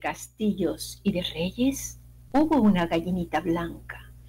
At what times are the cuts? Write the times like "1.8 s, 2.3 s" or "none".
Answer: none